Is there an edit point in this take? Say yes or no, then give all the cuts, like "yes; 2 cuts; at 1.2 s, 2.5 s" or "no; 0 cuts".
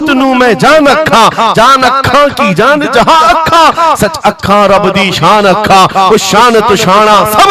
no; 0 cuts